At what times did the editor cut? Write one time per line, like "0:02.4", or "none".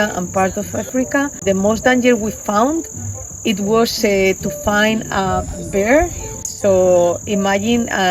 0:01.4
0:06.5

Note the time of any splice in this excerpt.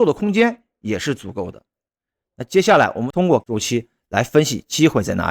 0:03.4

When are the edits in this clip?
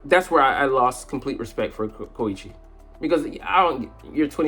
none

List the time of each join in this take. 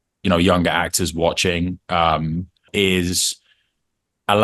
0:02.7

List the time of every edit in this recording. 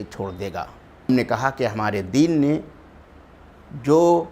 0:01.1

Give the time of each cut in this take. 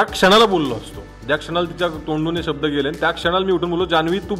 none

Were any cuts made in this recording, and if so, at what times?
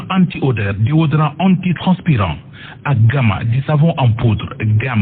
0:02.5

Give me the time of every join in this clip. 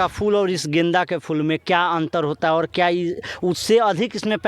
none

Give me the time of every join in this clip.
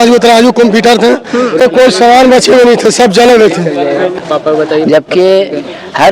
0:01.6
0:04.2

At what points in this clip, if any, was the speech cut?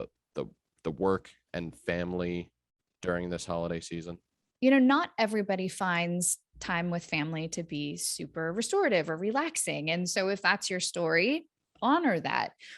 0:04.5

